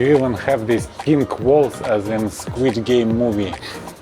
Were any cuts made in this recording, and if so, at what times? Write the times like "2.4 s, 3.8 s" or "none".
none

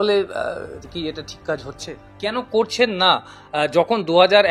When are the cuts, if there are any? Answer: 2.0 s

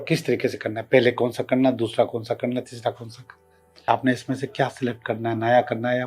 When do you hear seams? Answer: 3.9 s

